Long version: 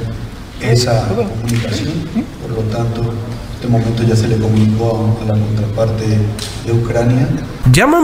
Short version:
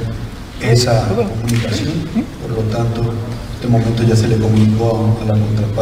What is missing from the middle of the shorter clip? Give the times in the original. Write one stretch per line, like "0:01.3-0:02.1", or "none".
none